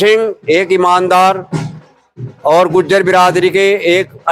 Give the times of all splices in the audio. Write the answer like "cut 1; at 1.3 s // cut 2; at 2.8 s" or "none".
none